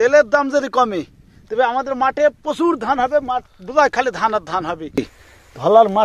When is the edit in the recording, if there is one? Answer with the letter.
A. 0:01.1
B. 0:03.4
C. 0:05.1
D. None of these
C